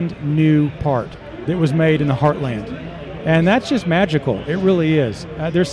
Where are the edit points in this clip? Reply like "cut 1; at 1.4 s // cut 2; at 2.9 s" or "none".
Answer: cut 1; at 1.3 s